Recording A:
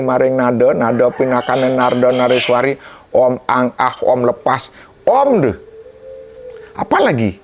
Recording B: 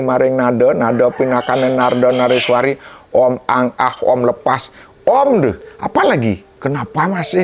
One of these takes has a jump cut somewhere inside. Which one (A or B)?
B